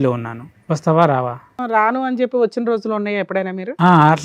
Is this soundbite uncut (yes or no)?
no